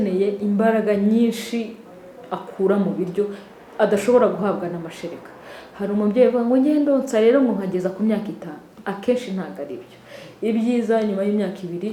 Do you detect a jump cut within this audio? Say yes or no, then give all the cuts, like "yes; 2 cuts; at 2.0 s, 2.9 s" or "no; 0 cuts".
no; 0 cuts